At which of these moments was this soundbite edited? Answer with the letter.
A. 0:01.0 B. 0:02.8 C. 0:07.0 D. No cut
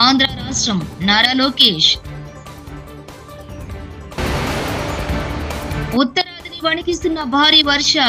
D